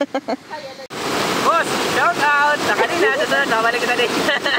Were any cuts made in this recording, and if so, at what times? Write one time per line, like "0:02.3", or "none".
0:00.9